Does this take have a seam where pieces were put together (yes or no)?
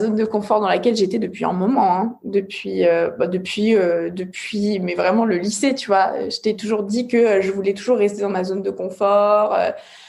no